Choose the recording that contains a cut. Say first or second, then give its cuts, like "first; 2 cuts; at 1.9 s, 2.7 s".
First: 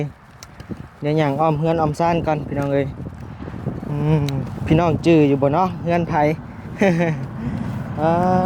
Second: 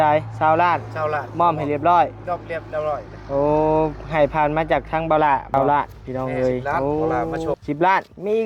second; 3 cuts; at 5.5 s, 6.8 s, 7.6 s